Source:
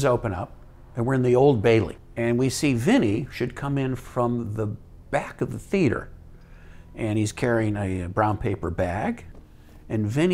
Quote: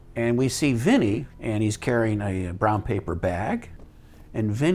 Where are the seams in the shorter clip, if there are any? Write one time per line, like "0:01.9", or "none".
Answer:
0:01.3